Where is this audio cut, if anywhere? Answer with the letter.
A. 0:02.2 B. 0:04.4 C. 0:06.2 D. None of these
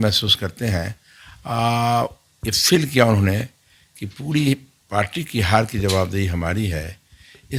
D